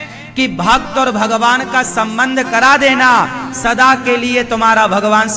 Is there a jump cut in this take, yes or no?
no